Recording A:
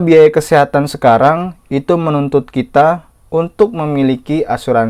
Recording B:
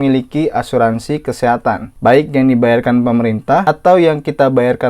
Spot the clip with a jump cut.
B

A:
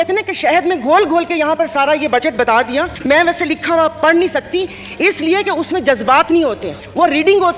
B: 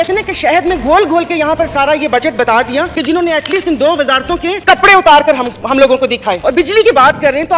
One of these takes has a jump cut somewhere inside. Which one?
B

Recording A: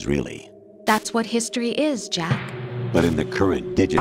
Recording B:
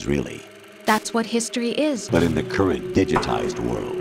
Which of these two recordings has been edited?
B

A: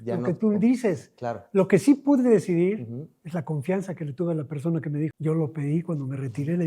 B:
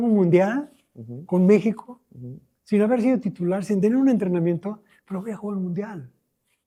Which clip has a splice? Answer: A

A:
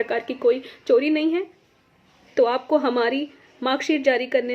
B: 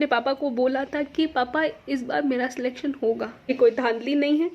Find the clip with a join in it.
B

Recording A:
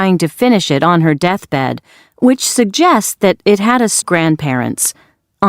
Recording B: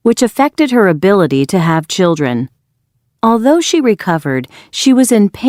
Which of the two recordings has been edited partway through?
A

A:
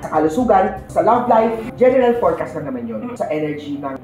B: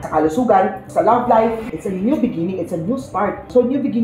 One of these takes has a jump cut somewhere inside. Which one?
B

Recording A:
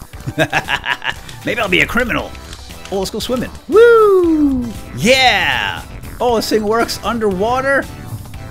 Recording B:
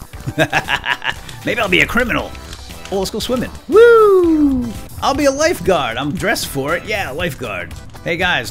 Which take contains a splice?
B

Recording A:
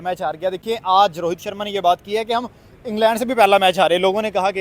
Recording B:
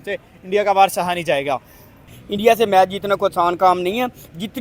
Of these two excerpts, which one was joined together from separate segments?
B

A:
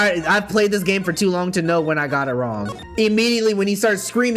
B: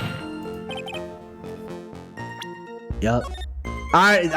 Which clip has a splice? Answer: A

